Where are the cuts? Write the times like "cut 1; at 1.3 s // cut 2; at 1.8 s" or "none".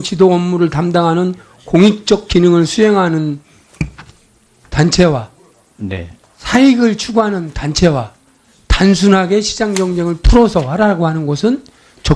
cut 1; at 5.4 s